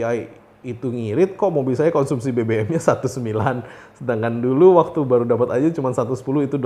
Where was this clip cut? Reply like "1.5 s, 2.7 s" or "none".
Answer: none